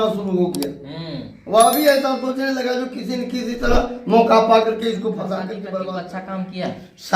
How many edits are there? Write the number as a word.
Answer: one